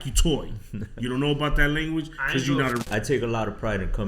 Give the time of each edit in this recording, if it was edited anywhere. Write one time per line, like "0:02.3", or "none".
0:02.9